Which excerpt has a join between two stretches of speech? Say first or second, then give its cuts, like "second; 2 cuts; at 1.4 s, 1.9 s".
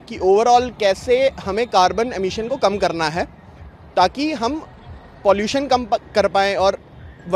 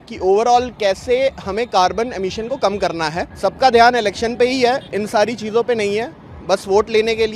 second; 1 cut; at 3.3 s